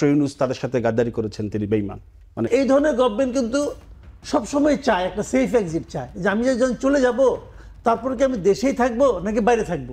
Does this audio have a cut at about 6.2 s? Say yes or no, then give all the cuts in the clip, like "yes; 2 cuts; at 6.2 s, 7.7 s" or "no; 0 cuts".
no; 1 cut; at 2.5 s